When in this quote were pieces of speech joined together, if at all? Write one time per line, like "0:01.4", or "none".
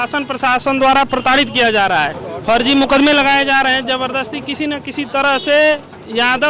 none